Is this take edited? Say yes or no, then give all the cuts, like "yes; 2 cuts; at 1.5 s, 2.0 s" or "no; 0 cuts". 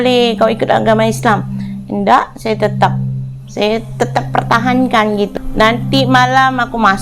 yes; 1 cut; at 5.3 s